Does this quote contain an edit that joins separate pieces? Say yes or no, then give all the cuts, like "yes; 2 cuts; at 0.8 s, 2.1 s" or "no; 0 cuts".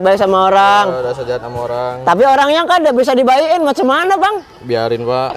no; 0 cuts